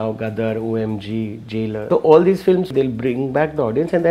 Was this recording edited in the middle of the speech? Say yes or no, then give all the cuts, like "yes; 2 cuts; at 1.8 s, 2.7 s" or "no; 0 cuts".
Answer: yes; 2 cuts; at 1.8 s, 2.7 s